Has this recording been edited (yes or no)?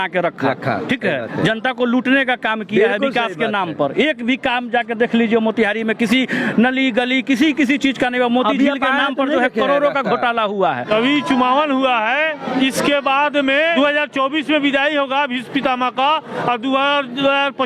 yes